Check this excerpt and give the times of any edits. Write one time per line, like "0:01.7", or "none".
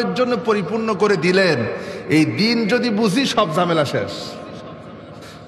none